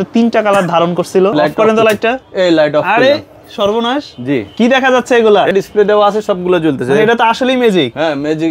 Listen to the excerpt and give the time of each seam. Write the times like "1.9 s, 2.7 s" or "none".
1.3 s, 5.5 s